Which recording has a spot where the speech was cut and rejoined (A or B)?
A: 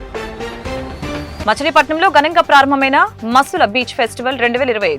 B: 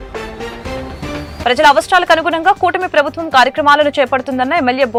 A